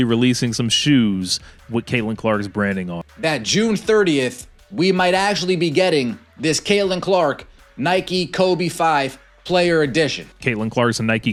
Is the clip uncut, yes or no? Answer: yes